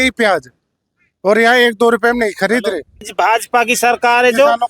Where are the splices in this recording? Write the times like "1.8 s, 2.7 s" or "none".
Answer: 3.0 s